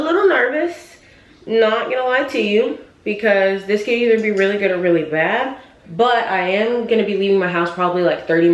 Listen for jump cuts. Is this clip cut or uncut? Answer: uncut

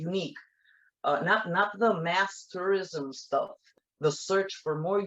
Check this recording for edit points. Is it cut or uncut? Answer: cut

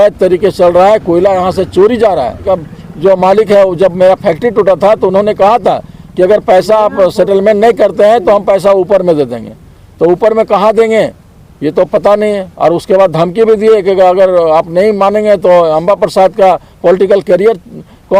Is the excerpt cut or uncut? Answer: cut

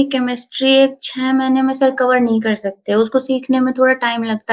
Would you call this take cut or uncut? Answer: uncut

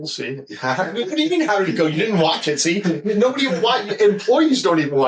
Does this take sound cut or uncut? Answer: uncut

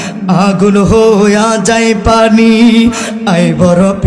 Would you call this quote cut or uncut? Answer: uncut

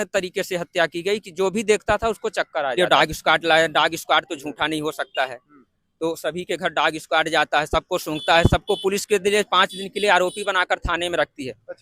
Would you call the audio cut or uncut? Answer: cut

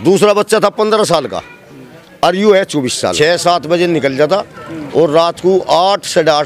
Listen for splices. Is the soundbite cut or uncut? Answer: cut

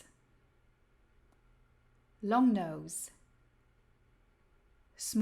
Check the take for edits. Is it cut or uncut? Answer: uncut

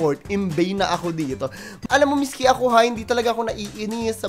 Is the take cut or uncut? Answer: cut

